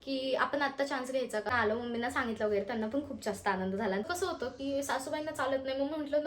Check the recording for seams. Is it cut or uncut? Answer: cut